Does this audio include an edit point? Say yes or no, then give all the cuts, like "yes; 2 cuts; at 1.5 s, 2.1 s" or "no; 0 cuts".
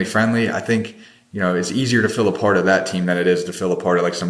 no; 0 cuts